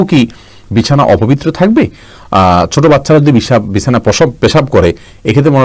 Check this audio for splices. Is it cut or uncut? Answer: uncut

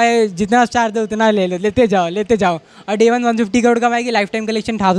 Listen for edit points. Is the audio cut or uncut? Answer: uncut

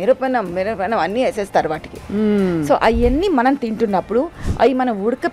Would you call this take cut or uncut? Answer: uncut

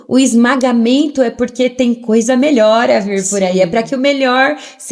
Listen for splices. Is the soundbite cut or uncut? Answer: uncut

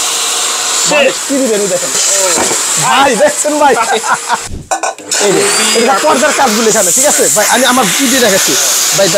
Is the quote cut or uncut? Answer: cut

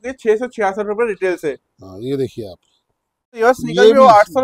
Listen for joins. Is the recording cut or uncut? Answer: cut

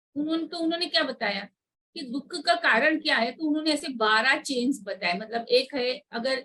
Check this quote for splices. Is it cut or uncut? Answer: uncut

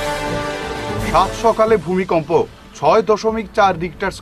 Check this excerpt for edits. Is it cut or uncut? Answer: uncut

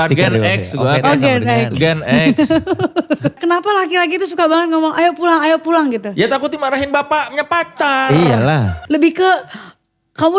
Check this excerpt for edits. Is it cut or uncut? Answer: cut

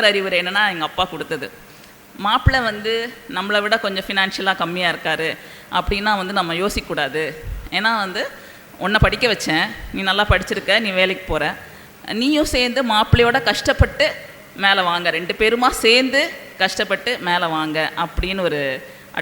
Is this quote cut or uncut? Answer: uncut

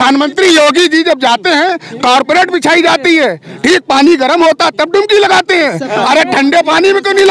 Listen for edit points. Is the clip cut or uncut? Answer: uncut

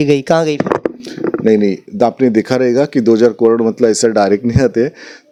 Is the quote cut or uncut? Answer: uncut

